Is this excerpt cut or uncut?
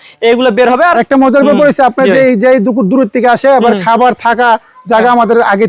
cut